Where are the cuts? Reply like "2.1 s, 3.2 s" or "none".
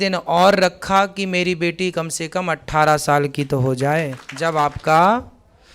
4.2 s

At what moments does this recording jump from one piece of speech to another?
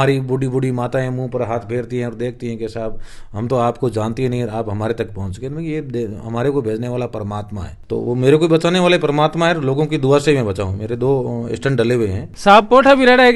7.8 s, 12.3 s

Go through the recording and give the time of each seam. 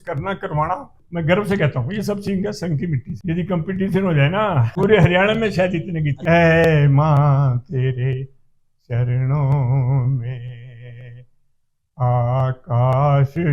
1.0 s, 3.1 s, 4.7 s, 6.1 s

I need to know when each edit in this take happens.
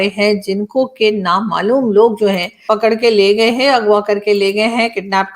2.5 s

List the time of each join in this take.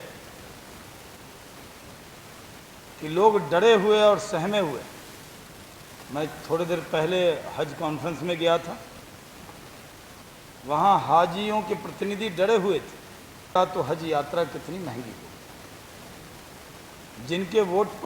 13.6 s

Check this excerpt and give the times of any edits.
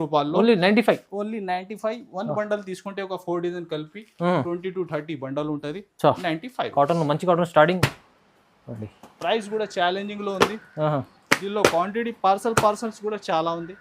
7.9 s

